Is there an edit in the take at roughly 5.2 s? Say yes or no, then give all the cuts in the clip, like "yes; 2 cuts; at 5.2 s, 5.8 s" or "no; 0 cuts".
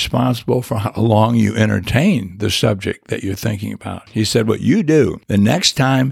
yes; 2 cuts; at 4.1 s, 5.2 s